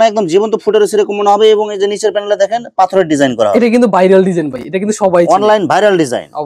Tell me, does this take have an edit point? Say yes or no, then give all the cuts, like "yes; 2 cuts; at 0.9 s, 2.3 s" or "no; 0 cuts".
no; 0 cuts